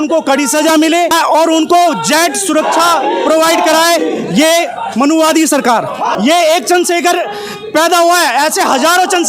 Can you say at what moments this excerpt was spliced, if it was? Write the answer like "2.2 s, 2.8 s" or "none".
1.1 s, 6.1 s